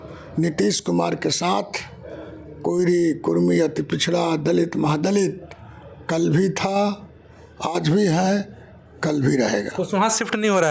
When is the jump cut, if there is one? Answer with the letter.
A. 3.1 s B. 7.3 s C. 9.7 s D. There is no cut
D